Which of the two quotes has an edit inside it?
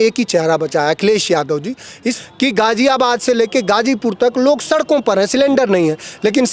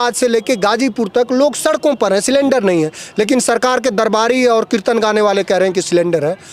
first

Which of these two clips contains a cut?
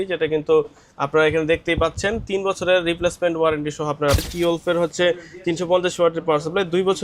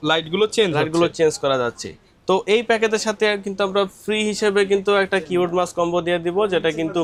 first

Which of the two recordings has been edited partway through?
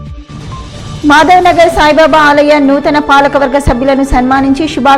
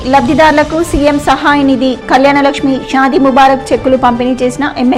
first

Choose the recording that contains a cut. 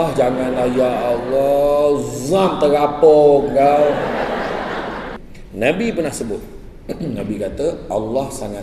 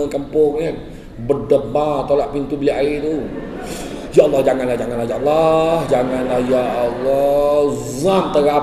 first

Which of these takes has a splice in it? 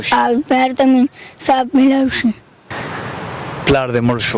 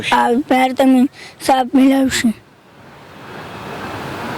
first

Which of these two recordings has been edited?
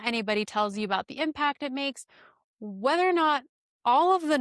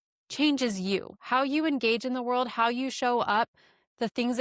second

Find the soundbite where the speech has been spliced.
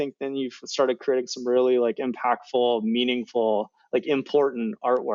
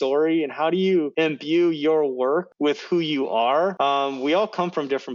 second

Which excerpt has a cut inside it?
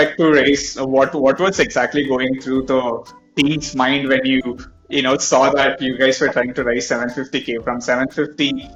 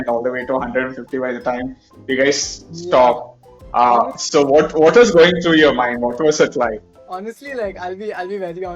second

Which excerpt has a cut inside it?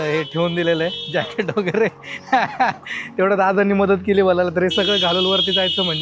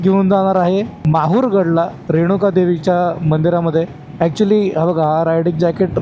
second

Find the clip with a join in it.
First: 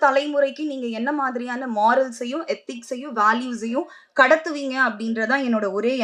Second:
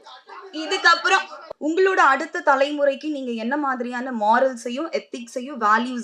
second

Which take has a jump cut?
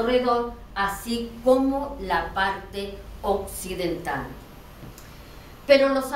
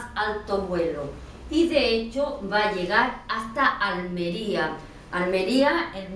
second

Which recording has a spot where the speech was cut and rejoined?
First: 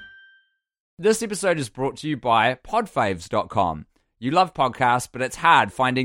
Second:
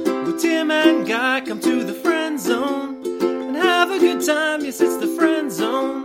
first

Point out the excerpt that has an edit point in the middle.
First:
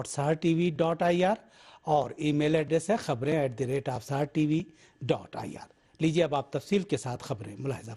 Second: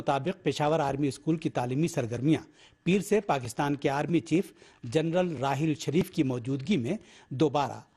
first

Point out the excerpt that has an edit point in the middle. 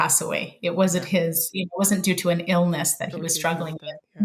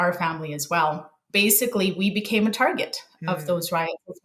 second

